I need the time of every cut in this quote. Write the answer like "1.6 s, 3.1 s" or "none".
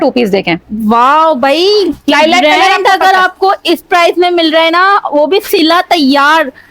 none